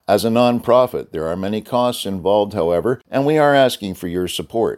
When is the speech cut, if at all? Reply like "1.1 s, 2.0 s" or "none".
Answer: 3.0 s